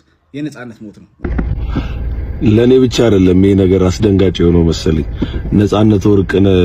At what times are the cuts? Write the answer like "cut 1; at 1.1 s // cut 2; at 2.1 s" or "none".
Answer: cut 1; at 1.0 s